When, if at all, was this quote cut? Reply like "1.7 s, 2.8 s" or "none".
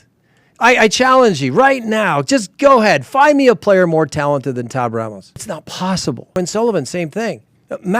5.4 s, 6.3 s